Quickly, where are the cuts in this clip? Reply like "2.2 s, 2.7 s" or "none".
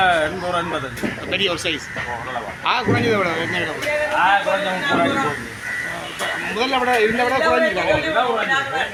none